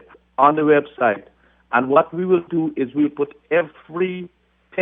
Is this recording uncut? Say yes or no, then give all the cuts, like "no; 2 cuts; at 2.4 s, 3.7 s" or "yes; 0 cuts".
yes; 0 cuts